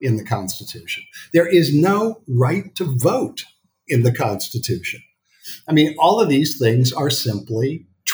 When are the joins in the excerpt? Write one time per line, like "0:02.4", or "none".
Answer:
none